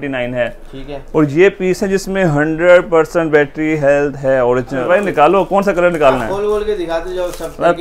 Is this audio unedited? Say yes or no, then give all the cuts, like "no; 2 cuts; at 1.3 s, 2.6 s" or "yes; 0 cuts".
no; 1 cut; at 4.8 s